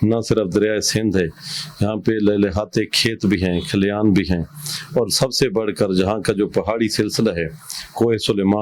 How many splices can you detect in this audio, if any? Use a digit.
0